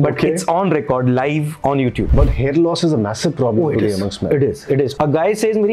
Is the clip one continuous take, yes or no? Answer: no